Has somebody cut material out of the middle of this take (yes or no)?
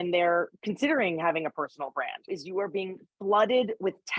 yes